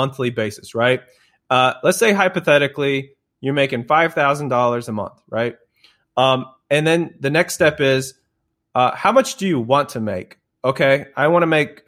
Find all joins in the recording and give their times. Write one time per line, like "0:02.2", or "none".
none